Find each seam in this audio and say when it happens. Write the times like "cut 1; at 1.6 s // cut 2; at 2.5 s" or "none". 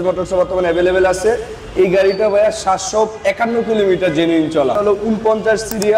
cut 1; at 4.8 s